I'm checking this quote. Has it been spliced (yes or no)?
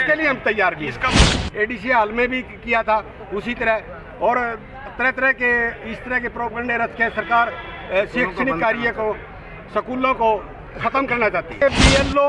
yes